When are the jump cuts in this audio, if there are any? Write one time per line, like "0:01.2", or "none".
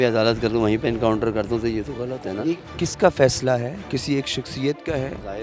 none